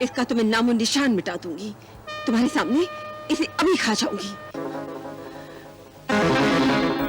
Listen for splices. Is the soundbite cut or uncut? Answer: cut